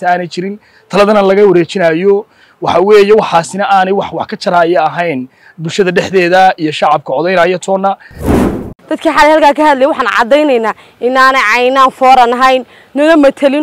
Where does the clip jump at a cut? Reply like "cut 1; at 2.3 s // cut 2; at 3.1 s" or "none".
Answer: cut 1; at 8.4 s